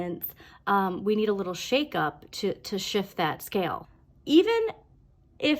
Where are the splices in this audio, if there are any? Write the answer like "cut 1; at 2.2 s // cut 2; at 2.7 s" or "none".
cut 1; at 3.8 s